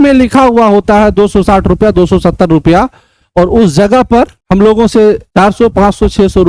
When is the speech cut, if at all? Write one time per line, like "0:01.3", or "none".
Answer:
0:04.4
0:05.2